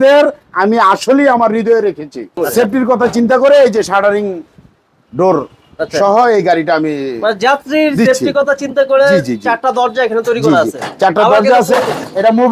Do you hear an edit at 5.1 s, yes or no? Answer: no